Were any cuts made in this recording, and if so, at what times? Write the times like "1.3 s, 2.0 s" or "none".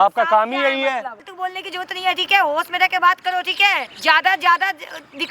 1.2 s, 3.9 s